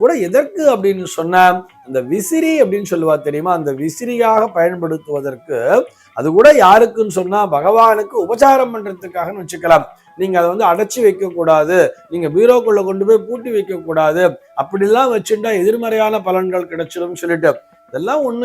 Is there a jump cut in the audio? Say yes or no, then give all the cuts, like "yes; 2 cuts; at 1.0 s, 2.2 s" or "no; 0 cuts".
yes; 1 cut; at 10.0 s